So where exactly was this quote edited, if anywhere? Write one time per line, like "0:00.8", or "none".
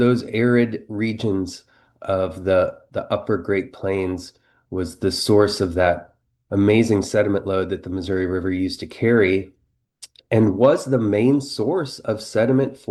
none